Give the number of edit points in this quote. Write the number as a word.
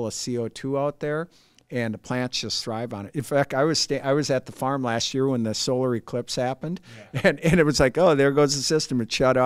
zero